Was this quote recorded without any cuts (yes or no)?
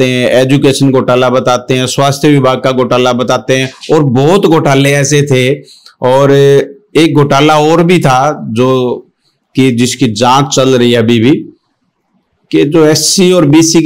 yes